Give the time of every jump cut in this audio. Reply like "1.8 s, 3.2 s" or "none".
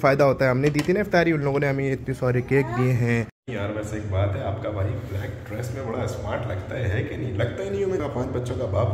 3.4 s, 8.0 s